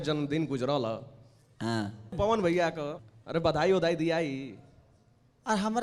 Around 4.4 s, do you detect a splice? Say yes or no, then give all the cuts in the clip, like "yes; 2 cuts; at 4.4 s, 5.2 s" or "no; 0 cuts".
no; 2 cuts; at 2.1 s, 3.0 s